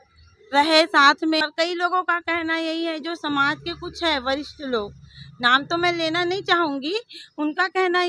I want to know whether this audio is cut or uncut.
cut